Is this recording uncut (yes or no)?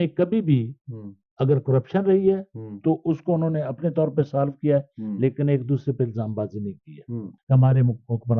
no